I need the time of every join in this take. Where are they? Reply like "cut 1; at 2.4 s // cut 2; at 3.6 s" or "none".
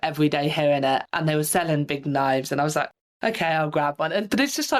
cut 1; at 1.0 s